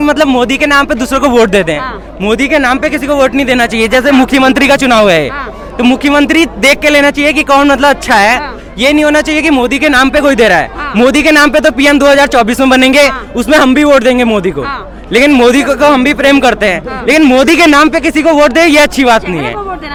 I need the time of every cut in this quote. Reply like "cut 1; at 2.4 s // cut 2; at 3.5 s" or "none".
none